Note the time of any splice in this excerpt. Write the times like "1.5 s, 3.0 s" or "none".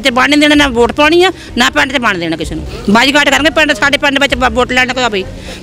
2.7 s